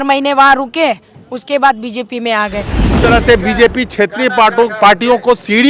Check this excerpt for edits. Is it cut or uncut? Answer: cut